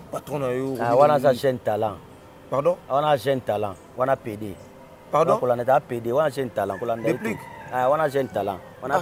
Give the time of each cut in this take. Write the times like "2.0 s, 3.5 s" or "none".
none